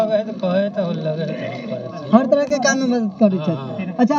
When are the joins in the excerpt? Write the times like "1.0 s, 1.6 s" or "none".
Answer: none